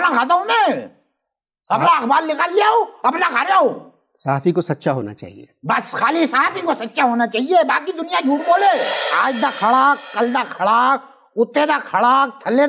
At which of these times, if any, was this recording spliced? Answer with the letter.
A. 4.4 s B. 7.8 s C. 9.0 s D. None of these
C